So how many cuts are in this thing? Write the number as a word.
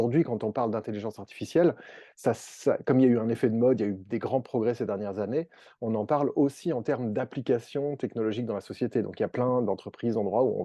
zero